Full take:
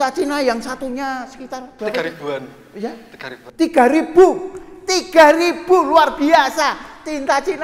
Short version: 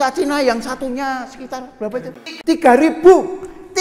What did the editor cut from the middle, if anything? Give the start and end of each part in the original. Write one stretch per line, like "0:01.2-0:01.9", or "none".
0:02.0-0:03.1